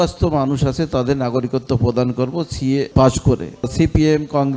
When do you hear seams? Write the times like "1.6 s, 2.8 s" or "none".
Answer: 2.9 s, 3.7 s